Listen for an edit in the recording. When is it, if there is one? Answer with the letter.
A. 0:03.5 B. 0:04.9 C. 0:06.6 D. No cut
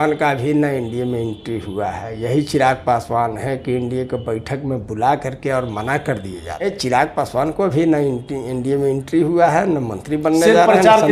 C